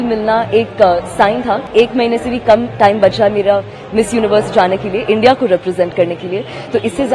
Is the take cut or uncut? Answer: cut